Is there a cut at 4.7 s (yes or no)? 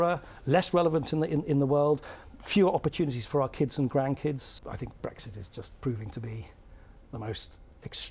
yes